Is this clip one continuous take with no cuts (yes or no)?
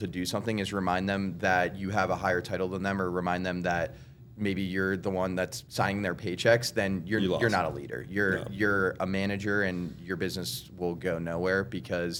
yes